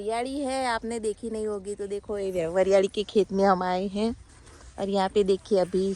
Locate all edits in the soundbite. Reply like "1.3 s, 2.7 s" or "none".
none